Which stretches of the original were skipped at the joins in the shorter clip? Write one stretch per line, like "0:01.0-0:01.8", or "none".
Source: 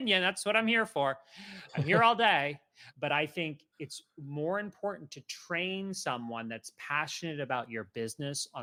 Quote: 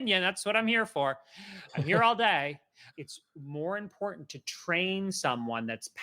0:02.8-0:03.7